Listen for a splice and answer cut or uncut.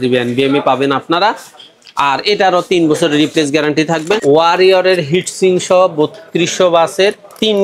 cut